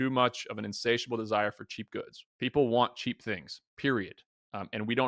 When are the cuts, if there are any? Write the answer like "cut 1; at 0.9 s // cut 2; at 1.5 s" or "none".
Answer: cut 1; at 2.2 s